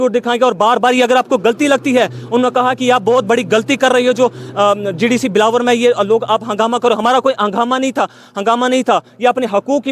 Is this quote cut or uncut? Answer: uncut